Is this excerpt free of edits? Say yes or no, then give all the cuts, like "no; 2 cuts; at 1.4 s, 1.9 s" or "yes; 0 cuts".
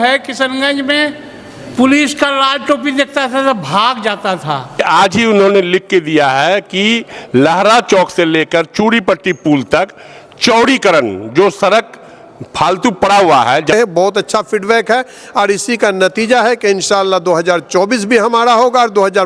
no; 2 cuts; at 4.8 s, 13.7 s